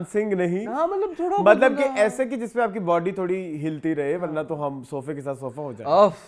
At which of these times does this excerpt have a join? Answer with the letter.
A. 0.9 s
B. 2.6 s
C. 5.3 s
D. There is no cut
D